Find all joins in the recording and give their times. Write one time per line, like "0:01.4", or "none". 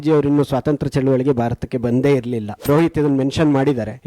0:02.6